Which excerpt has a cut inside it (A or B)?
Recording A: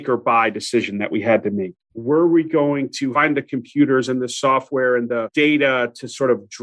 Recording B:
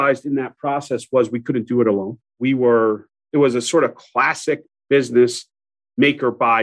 A